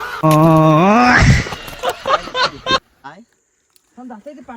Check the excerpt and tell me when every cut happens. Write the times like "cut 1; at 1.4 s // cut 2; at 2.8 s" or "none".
cut 1; at 2.9 s